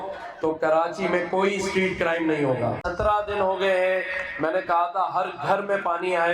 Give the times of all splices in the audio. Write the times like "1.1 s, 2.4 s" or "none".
2.8 s